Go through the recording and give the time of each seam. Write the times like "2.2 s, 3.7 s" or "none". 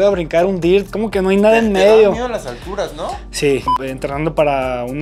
3.7 s